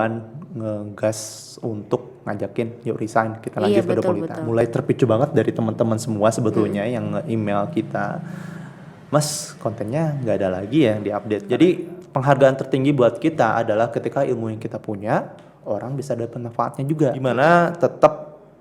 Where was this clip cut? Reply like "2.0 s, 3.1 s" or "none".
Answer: 4.6 s, 11.4 s, 17.2 s

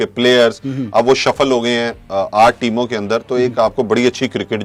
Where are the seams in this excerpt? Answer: none

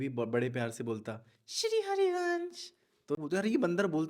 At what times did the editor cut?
3.2 s

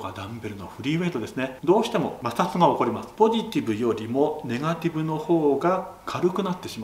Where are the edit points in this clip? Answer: 1.5 s, 3.0 s

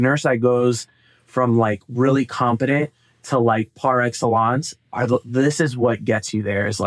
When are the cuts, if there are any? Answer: none

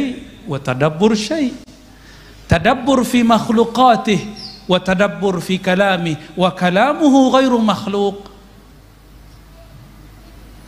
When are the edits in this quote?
none

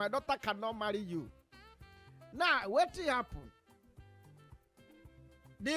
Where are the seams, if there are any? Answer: none

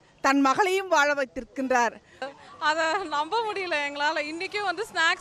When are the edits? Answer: 2.3 s

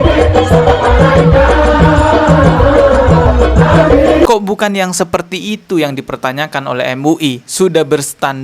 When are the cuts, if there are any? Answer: 4.3 s

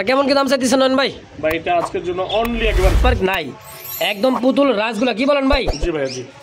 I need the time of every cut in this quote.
3.0 s

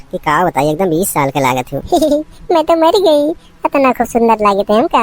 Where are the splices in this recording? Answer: 1.8 s

